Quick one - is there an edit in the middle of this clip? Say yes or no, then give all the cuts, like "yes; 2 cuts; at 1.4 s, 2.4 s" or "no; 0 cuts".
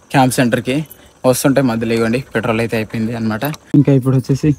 yes; 1 cut; at 3.5 s